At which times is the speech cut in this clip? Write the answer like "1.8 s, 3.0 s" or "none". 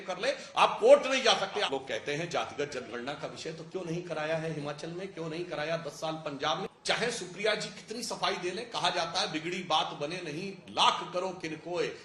1.7 s, 6.7 s